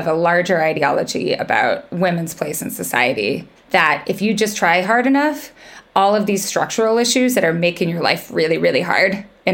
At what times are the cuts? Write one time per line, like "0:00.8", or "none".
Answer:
0:03.5